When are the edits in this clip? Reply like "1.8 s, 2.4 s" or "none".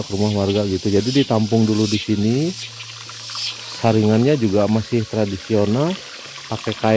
none

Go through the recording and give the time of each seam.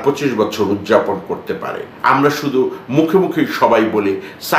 1.9 s

